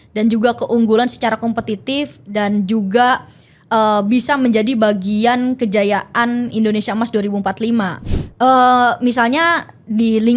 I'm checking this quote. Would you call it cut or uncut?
cut